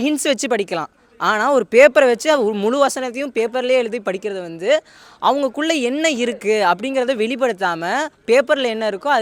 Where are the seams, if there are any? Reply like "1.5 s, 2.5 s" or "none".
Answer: none